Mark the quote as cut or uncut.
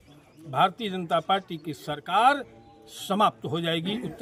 uncut